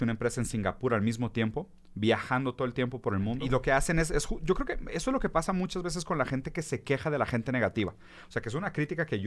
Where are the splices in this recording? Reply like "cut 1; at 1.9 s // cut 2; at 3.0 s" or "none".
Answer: cut 1; at 3.4 s